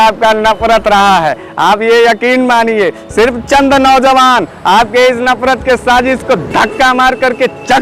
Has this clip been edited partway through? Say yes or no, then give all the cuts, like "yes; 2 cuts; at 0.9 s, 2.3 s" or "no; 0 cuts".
no; 0 cuts